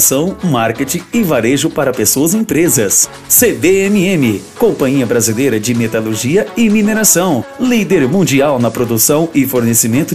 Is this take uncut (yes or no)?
yes